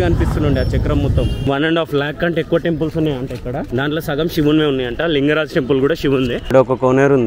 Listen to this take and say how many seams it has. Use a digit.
2